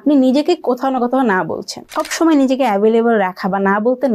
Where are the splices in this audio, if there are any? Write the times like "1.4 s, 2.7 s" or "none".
2.0 s